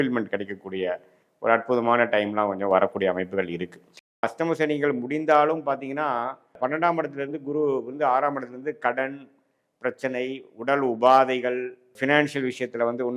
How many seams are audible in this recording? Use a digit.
1